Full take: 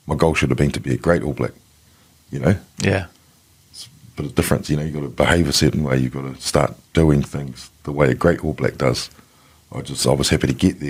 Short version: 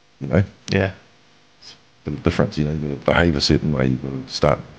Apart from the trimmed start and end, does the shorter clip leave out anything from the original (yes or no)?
no